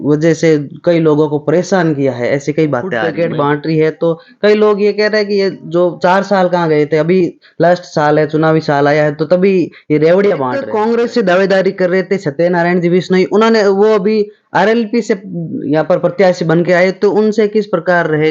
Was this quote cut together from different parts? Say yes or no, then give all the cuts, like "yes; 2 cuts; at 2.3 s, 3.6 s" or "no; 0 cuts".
yes; 2 cuts; at 3.0 s, 10.7 s